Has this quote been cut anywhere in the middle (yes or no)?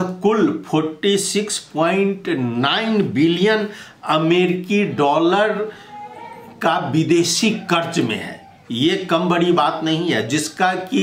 no